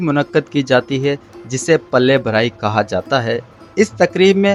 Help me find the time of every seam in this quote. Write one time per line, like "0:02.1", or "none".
none

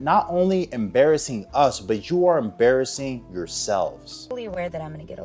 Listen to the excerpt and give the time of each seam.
0:04.2

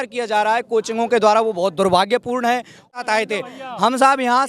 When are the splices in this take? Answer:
0:02.9

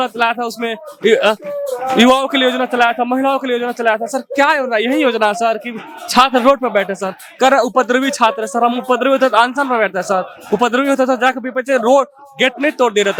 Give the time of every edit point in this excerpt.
none

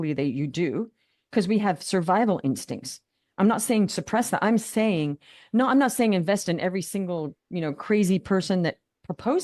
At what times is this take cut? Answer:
none

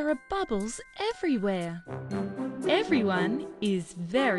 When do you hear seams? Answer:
none

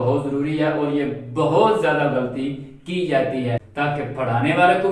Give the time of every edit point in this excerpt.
0:03.7

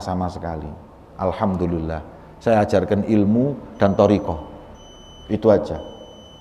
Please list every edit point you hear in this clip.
none

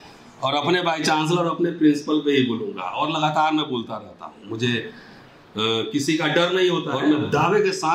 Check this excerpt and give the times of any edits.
0:06.9

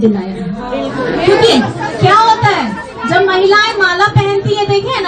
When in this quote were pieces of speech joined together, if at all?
0:01.5

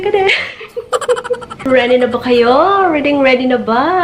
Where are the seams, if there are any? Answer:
0:01.6

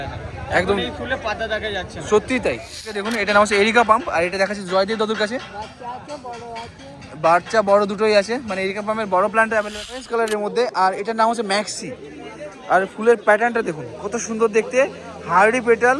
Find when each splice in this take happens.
0:03.0
0:10.1

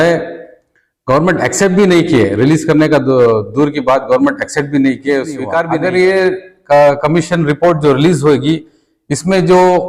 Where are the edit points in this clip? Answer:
0:05.7

